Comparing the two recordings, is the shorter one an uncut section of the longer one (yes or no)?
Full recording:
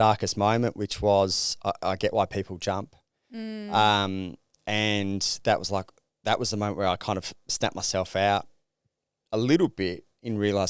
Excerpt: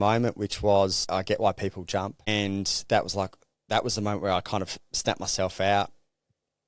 no